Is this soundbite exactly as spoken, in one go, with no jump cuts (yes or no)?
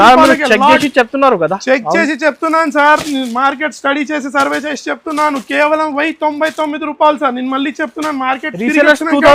yes